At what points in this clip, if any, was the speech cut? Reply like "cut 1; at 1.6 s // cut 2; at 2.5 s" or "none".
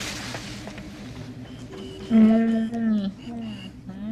none

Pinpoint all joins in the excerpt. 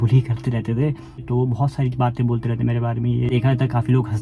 cut 1; at 1.2 s // cut 2; at 3.3 s

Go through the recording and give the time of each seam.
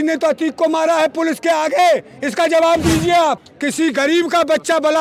cut 1; at 3.5 s

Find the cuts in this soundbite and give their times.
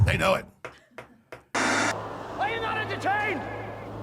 cut 1; at 1.4 s

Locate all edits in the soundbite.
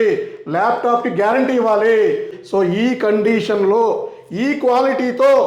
cut 1; at 2.4 s

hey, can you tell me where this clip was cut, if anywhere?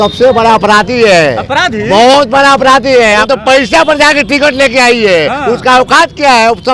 cut 1; at 3.2 s

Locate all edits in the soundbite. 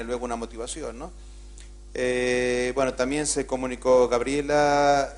cut 1; at 1.0 s

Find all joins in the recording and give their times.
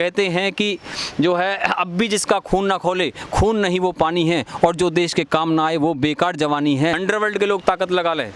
cut 1; at 7.0 s

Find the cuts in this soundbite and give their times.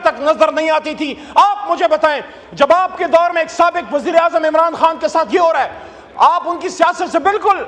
none

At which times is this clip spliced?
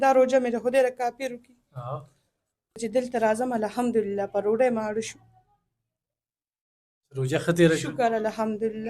cut 1; at 2.8 s

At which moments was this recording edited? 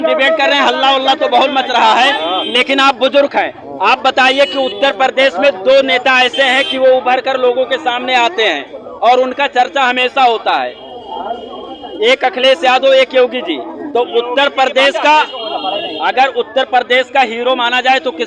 none

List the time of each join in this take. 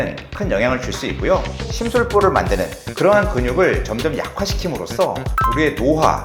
cut 1; at 1.6 s

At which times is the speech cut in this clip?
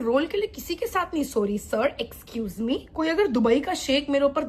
none

